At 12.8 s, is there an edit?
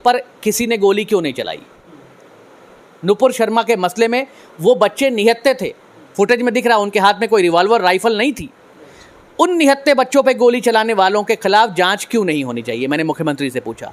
no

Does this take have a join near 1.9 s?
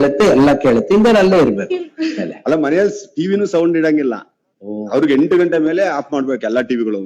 yes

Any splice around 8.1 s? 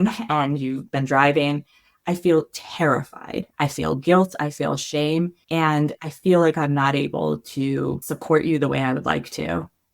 yes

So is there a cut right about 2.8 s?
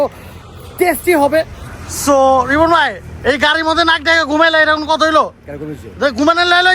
no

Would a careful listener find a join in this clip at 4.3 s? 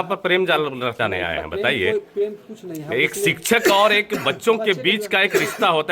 no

